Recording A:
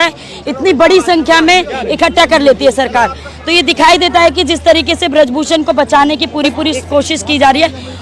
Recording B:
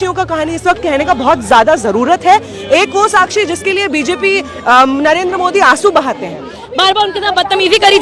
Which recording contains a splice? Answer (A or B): B